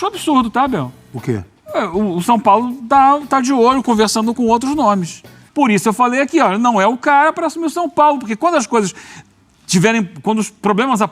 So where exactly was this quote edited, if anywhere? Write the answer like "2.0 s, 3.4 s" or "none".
5.4 s